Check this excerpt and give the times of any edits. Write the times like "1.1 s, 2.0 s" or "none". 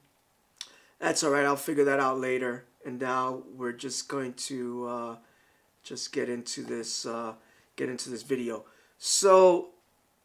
7.8 s